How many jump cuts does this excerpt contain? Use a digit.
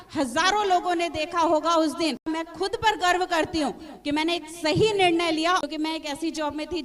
2